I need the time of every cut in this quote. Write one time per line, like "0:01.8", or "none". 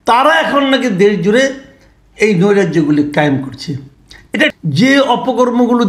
0:04.5